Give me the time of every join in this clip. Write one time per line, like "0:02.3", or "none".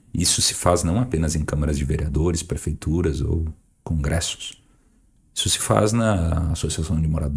none